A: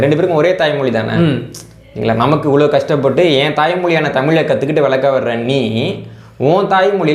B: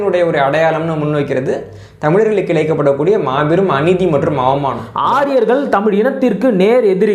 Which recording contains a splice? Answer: B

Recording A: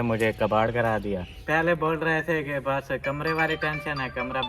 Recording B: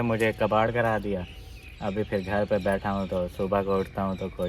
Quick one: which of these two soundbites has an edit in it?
A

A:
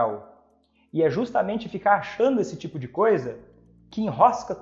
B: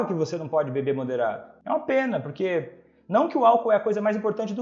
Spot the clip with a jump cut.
B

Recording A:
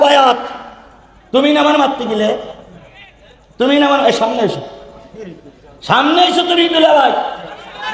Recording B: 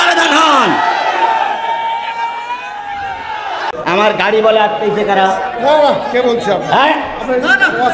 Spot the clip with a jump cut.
B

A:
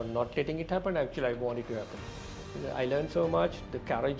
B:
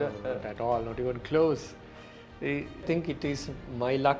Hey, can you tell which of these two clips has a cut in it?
B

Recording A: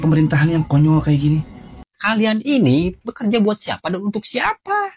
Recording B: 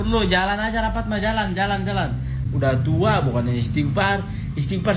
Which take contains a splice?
A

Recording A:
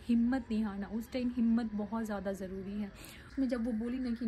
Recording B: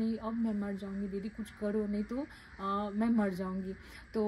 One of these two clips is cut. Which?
A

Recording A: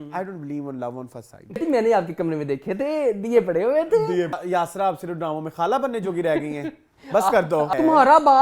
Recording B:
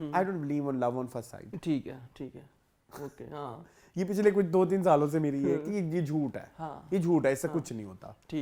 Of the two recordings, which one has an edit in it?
A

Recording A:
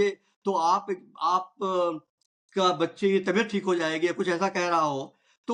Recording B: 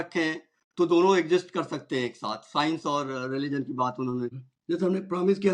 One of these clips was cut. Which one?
B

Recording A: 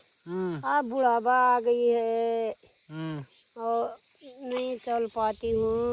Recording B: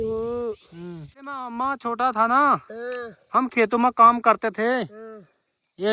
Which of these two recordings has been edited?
B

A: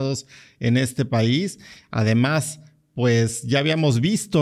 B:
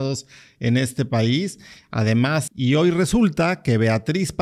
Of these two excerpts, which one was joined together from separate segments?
B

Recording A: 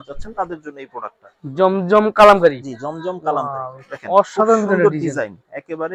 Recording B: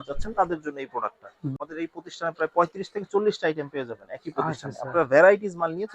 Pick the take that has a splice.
B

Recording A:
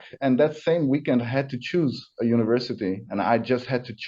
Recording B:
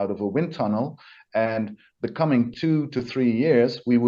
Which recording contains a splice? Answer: A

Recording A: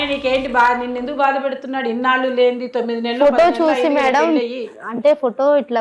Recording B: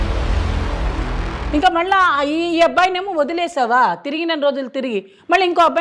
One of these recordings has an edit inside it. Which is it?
B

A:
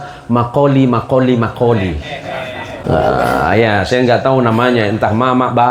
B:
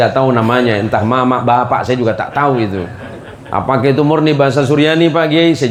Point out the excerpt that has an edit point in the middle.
A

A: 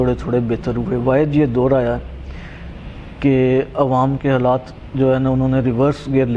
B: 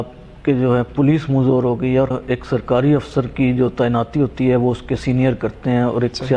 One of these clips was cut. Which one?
B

